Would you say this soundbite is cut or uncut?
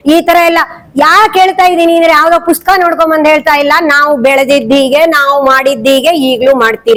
uncut